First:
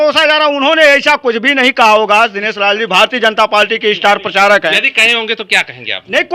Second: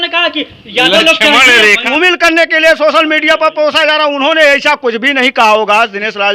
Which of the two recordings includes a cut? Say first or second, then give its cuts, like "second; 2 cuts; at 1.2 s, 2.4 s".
second; 1 cut; at 1.8 s